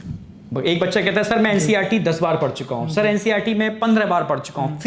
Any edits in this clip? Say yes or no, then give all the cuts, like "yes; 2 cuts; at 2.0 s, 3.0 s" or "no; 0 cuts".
no; 0 cuts